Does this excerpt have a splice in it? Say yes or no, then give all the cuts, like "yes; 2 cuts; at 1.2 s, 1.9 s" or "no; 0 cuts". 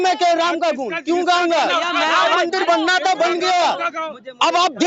no; 0 cuts